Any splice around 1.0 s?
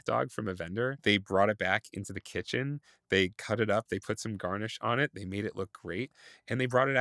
yes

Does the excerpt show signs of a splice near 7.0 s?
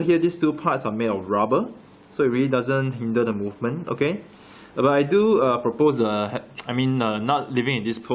no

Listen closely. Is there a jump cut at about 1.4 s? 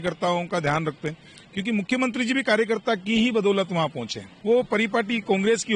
no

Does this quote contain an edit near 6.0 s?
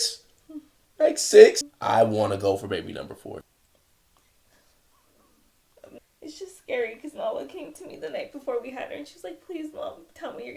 yes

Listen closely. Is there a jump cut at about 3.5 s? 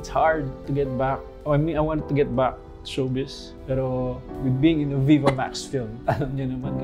yes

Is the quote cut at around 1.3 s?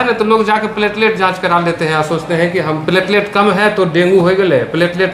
no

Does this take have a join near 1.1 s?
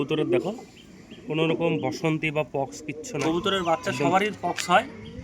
no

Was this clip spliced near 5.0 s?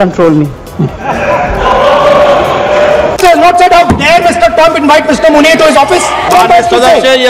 no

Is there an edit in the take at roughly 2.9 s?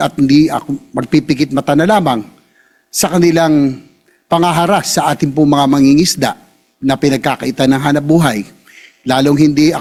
no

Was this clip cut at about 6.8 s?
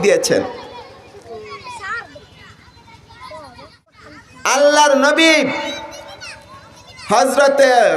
no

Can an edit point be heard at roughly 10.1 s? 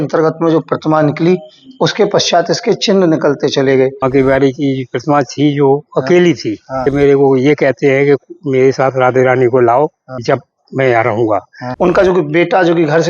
yes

